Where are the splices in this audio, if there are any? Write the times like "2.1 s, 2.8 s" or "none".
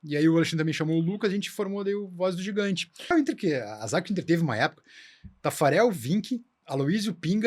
3.1 s